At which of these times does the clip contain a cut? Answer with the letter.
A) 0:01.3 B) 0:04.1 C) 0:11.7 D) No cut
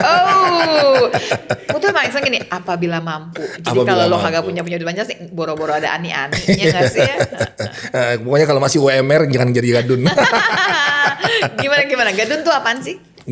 D